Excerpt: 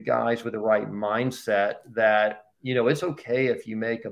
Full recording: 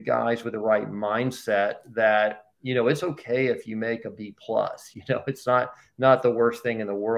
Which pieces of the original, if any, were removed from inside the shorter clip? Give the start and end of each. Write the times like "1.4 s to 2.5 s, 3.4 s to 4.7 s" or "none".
none